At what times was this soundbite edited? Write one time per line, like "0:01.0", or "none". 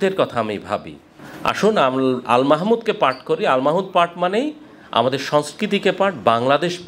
0:01.3